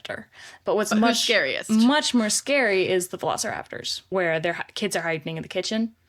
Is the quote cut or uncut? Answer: cut